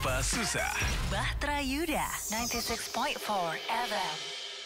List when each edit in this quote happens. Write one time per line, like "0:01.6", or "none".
none